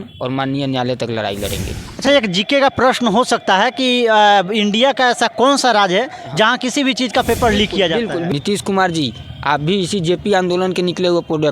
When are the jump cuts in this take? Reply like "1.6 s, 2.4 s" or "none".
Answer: 2.0 s, 8.3 s